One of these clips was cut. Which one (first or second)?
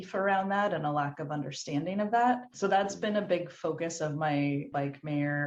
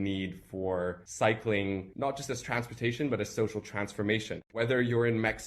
second